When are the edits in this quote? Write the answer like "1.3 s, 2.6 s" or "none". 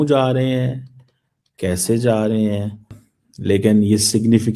3.0 s